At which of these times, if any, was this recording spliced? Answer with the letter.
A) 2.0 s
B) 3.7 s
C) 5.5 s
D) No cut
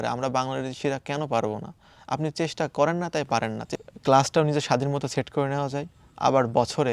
B